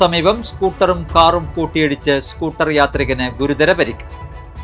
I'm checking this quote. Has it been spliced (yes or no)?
no